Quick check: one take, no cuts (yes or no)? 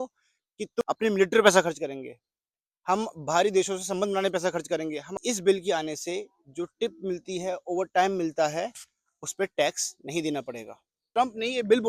no